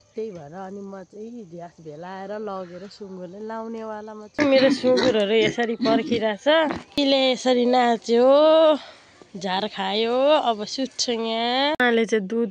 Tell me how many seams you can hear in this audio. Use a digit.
3